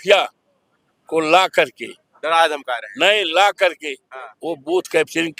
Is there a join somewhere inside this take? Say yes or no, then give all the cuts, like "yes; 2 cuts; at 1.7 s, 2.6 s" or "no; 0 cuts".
no; 0 cuts